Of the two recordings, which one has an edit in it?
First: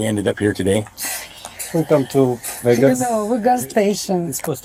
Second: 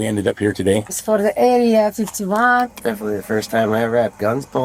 second; 2 cuts; at 1.0 s, 2.7 s

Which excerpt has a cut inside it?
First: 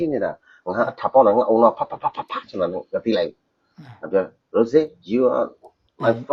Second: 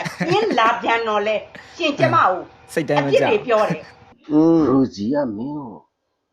second; 1 cut; at 4.2 s

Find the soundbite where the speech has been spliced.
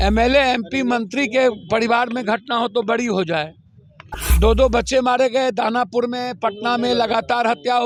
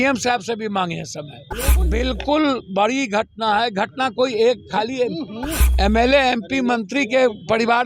second; 1 cut; at 1.8 s

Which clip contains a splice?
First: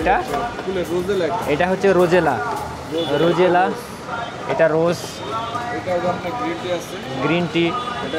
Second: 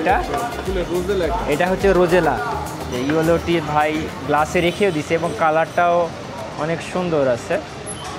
second; 1 cut; at 2.9 s

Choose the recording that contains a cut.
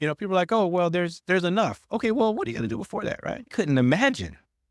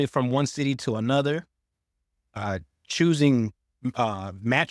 first; 1 cut; at 3.5 s

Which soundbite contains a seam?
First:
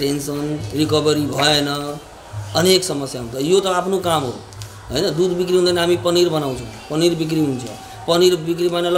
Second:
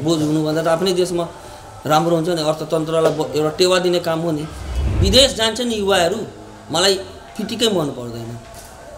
second; 1 cut; at 5.0 s

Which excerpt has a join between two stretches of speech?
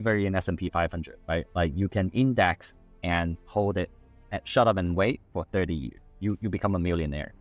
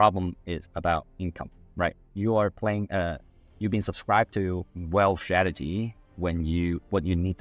second; 1 cut; at 4.7 s

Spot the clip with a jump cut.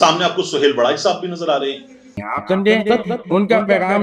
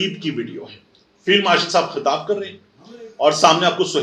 first; 1 cut; at 2.2 s

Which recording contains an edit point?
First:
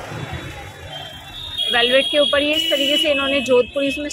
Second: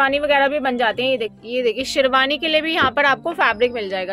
second; 1 cut; at 1.4 s

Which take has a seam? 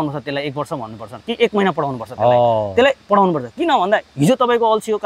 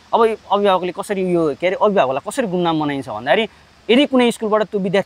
second; 1 cut; at 3.7 s

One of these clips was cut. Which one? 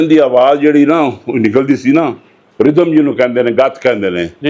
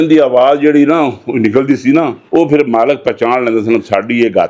second; 1 cut; at 2.2 s

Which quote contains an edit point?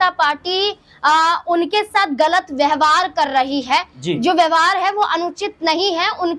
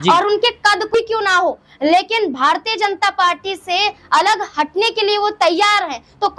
second; 1 cut; at 0.9 s

